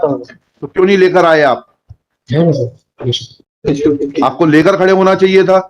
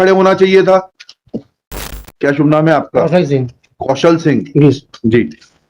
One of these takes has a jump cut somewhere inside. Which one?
second; 1 cut; at 2.1 s

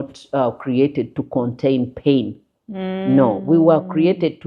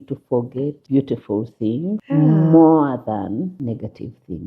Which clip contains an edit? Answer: second; 3 cuts; at 0.8 s, 2.0 s, 3.5 s

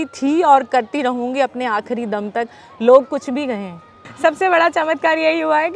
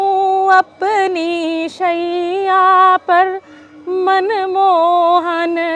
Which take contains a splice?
first; 1 cut; at 4.0 s

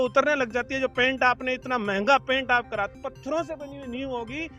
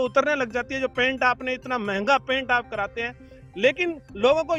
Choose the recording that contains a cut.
first; 1 cut; at 2.9 s

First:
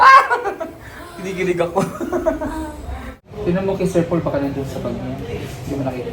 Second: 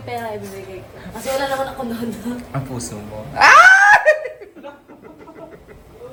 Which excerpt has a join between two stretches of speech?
first; 1 cut; at 3.2 s

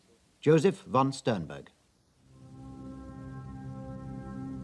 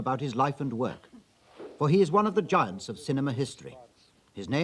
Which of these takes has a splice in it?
second; 1 cut; at 3.3 s

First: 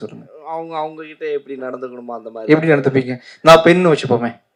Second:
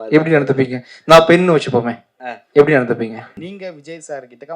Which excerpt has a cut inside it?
second; 1 cut; at 3.4 s

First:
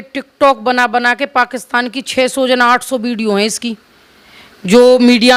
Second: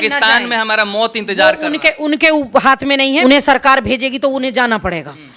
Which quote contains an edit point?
second; 1 cut; at 3.2 s

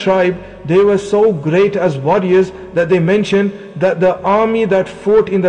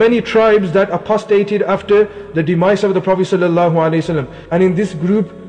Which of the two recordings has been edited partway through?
second; 1 cut; at 4.3 s

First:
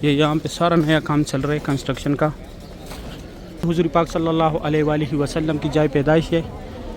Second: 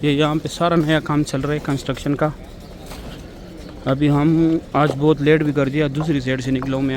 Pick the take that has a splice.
first; 1 cut; at 3.7 s

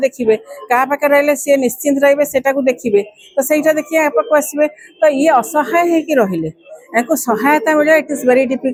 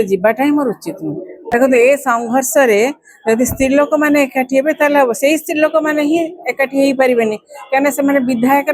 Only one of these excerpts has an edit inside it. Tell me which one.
second; 1 cut; at 1.4 s

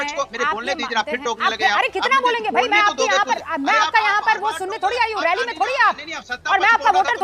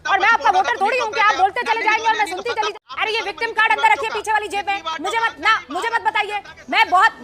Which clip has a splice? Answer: second; 2 cuts; at 2.7 s, 4.8 s

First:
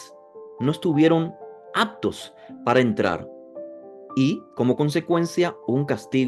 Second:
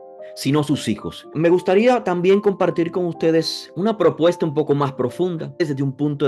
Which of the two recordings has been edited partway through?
second; 3 cuts; at 1.3 s, 3.6 s, 5.6 s

